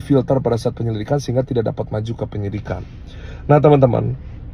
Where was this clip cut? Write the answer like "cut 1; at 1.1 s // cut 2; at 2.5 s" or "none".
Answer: none